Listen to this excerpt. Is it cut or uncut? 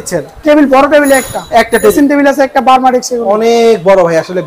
cut